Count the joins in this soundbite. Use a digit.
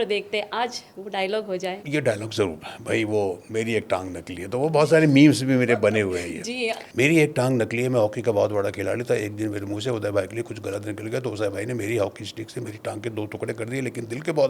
2